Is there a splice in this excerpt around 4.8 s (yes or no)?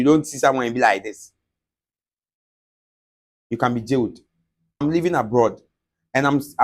yes